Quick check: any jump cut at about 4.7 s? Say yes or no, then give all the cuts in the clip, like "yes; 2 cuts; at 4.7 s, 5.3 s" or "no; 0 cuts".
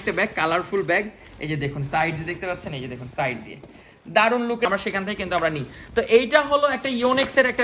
yes; 1 cut; at 4.7 s